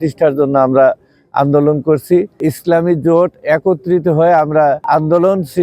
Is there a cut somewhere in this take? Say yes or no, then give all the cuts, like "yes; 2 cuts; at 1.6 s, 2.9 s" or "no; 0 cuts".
yes; 2 cuts; at 2.4 s, 4.8 s